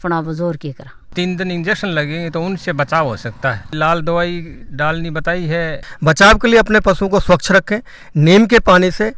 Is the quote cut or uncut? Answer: cut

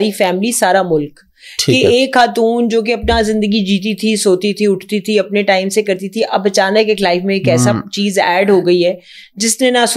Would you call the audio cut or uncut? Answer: uncut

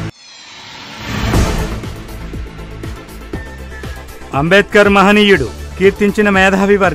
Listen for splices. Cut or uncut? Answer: cut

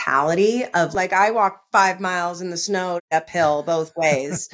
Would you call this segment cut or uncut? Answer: cut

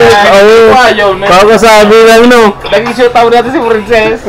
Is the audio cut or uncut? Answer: uncut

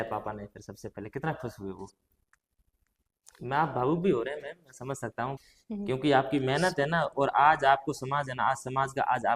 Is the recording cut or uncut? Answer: cut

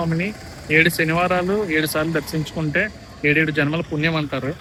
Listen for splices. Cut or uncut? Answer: uncut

